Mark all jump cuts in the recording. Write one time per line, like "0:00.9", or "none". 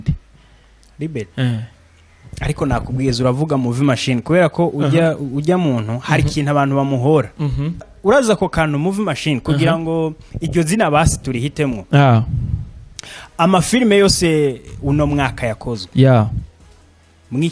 0:07.9